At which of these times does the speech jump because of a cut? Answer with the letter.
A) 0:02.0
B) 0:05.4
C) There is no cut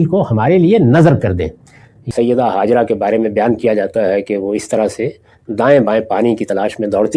A